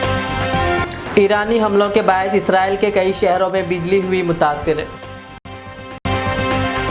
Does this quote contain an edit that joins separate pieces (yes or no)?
yes